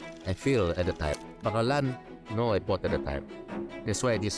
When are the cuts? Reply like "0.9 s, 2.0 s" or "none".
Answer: 1.3 s